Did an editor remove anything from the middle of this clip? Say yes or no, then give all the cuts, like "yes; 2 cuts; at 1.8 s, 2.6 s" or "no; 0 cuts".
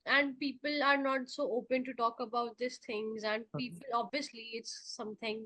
no; 0 cuts